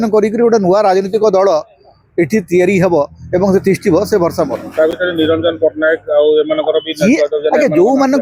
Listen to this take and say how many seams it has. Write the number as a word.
zero